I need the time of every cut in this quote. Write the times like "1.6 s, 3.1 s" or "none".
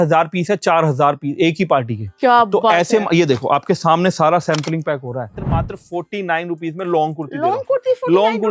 5.4 s